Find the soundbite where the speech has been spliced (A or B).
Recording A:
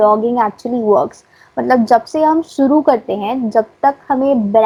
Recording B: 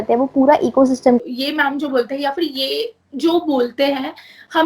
B